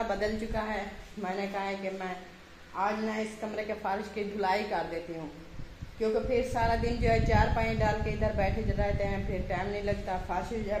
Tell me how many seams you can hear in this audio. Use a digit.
0